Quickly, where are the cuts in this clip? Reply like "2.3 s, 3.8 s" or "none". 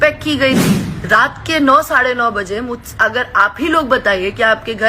0.9 s